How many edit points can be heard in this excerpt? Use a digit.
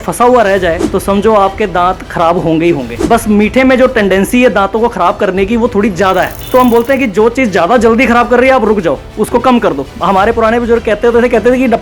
4